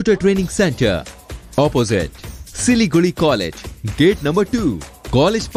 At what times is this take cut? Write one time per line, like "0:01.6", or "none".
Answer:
none